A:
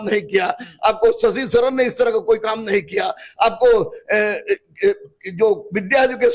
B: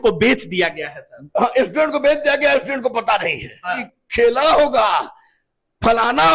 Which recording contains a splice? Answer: B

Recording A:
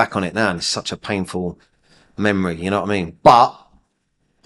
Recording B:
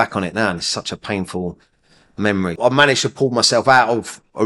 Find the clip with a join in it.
B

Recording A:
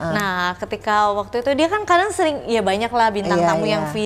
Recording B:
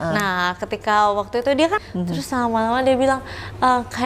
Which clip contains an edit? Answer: B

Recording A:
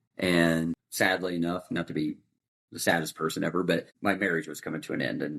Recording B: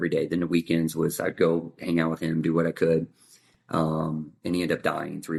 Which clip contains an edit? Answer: A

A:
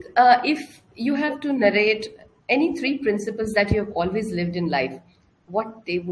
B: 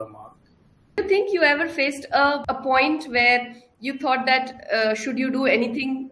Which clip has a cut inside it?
B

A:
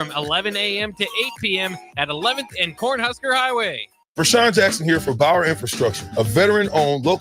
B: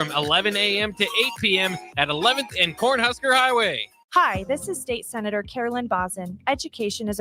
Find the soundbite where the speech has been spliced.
A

